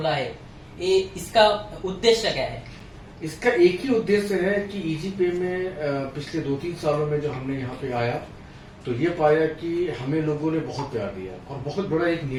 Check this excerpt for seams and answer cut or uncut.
uncut